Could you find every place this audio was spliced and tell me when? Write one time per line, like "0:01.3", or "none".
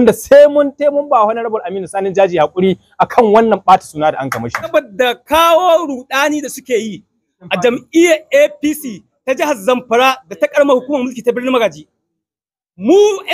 0:04.7